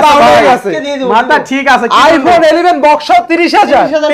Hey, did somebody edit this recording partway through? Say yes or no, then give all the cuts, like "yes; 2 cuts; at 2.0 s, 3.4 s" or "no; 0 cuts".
no; 0 cuts